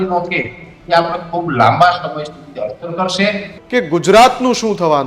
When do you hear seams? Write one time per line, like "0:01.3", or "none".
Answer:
0:03.5